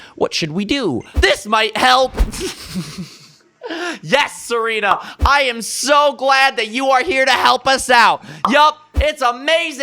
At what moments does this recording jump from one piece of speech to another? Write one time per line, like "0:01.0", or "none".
0:01.1